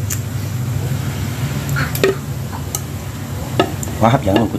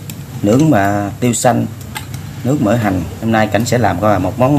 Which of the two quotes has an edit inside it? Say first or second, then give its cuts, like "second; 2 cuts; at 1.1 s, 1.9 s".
second; 1 cut; at 3.1 s